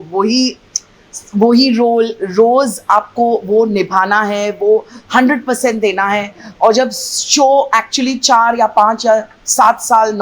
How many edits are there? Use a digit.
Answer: 0